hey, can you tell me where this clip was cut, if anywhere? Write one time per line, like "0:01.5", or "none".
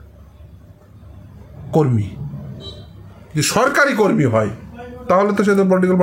none